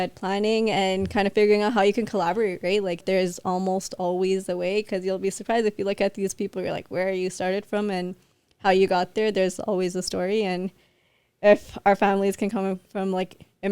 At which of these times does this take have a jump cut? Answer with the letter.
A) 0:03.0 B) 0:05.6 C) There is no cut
A